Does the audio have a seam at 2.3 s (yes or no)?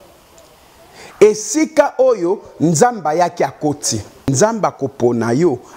no